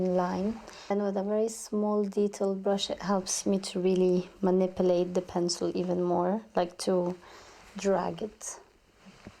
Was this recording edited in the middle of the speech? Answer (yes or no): yes